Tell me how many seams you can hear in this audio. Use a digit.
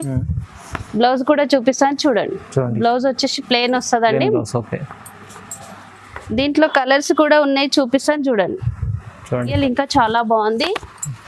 1